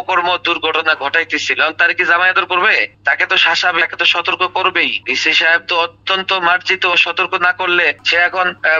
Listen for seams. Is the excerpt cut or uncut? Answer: uncut